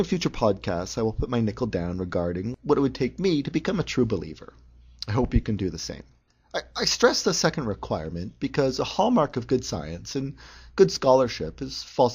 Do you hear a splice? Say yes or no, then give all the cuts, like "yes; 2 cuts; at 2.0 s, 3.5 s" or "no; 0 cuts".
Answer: no; 0 cuts